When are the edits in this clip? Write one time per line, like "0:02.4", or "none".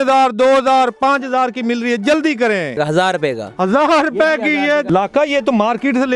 0:02.8
0:04.9

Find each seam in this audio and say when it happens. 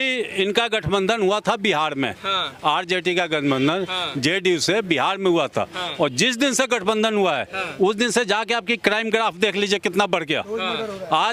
none

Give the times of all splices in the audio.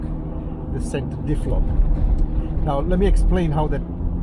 none

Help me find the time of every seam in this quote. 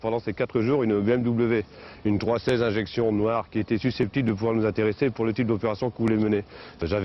0:04.4

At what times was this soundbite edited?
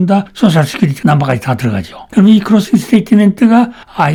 none

